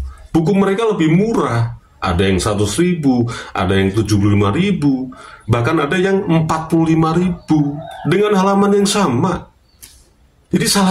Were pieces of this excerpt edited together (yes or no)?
no